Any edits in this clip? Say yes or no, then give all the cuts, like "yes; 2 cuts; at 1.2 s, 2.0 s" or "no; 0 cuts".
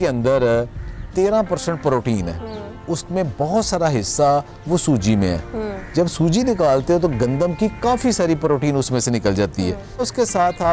yes; 2 cuts; at 2.8 s, 10.0 s